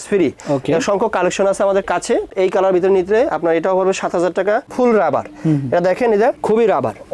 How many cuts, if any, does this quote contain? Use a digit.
2